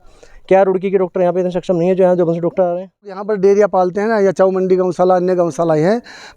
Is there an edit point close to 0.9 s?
no; 1 cut; at 3.3 s

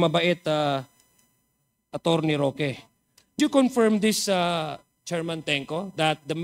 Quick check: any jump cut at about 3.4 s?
yes; 1 cut; at 3.4 s

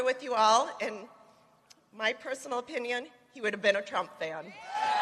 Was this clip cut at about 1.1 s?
no; 0 cuts

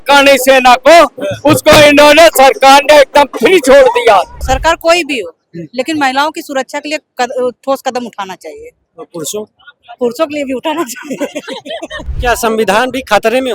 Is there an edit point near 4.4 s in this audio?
yes; 2 cuts; at 4.4 s, 12.0 s

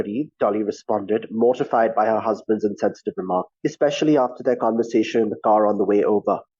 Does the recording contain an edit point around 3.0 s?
no; 0 cuts

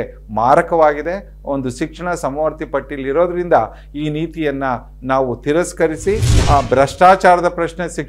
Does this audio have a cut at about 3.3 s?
no; 1 cut; at 6.3 s

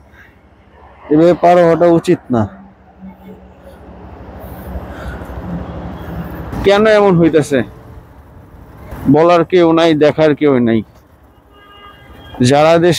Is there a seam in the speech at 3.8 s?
no; 2 cuts; at 6.5 s, 8.8 s

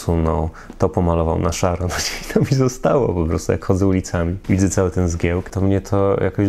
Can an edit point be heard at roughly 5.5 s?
yes; 2 cuts; at 4.4 s, 5.5 s

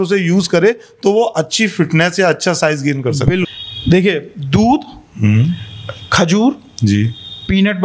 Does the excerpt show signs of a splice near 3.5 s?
yes; 1 cut; at 3.5 s

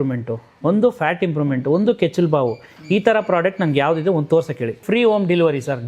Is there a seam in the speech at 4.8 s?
yes; 1 cut; at 4.8 s

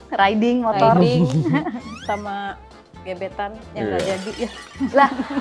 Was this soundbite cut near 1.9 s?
yes; 1 cut; at 1.9 s

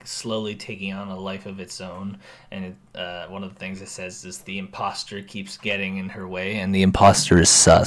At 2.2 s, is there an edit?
no; 0 cuts

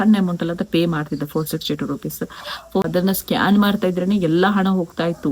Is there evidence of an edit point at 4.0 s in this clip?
no; 1 cut; at 2.8 s

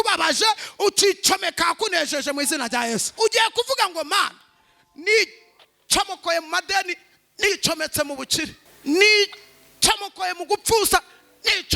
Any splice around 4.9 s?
no; 2 cuts; at 3.1 s, 8.6 s

